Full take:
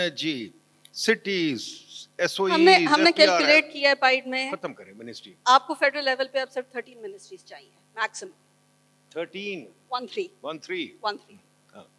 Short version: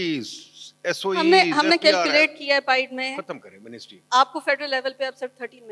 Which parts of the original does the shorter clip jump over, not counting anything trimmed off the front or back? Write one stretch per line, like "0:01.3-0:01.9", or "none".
none